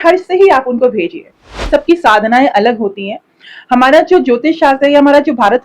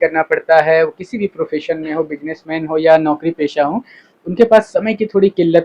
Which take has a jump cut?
first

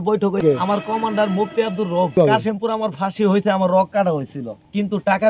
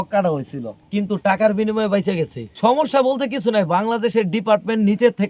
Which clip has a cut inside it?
second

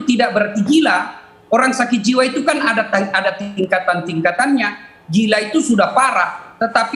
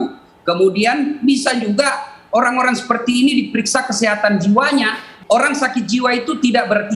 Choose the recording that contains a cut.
second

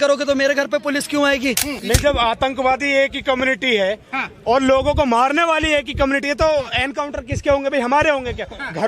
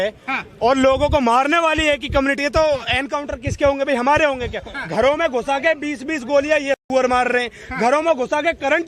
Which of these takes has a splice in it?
first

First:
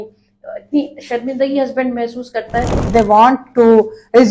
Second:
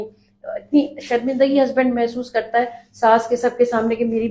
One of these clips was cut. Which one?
first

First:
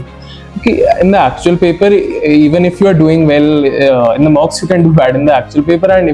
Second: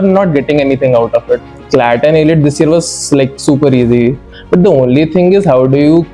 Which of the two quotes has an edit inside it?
second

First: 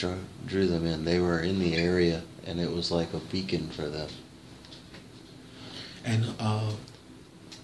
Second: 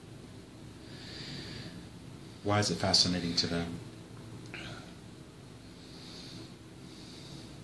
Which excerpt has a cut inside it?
first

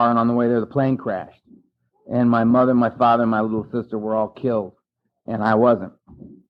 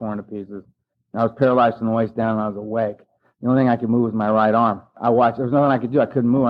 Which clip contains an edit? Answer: second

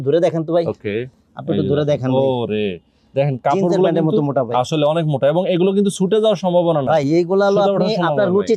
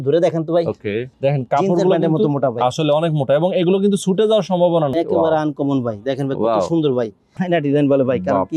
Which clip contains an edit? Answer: second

